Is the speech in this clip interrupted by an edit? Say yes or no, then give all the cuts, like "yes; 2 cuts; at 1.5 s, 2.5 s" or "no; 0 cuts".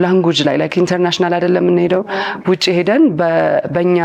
no; 0 cuts